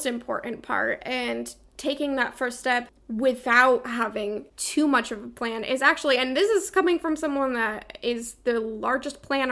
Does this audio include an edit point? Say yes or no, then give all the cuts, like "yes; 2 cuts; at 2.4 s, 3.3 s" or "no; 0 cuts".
yes; 2 cuts; at 3.0 s, 4.5 s